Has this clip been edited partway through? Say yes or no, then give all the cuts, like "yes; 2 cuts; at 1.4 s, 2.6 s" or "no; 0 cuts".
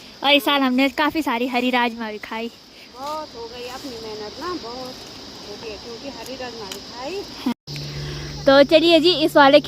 yes; 1 cut; at 7.5 s